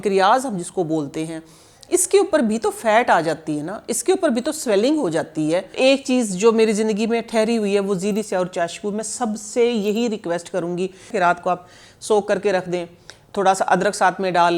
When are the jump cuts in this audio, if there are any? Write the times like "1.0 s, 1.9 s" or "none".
5.8 s, 11.1 s